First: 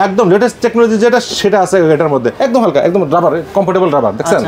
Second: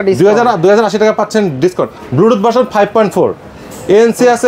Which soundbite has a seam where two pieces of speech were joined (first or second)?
first